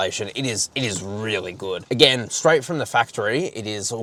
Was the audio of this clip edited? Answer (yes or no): no